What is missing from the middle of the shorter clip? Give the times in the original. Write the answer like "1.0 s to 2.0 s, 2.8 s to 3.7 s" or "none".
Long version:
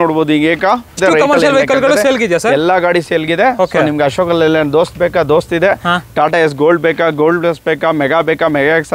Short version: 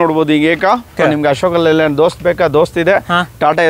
0.9 s to 3.7 s